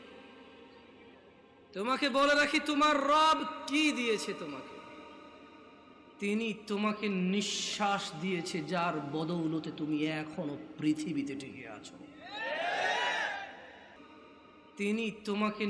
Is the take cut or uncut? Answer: cut